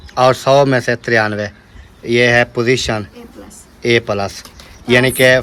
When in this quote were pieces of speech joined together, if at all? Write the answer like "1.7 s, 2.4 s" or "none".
none